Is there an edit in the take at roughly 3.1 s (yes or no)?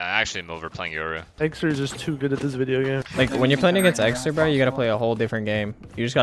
yes